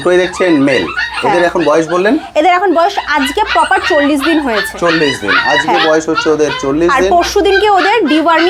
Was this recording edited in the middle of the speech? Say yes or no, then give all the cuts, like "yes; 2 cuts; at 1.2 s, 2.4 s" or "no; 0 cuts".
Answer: no; 0 cuts